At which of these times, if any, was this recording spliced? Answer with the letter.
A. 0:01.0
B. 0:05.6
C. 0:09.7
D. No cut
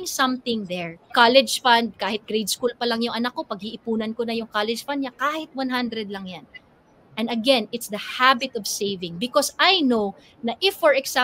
A